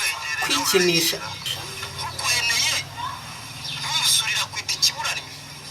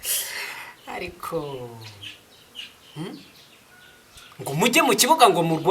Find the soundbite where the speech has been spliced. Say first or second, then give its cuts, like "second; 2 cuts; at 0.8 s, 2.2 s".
first; 1 cut; at 1.5 s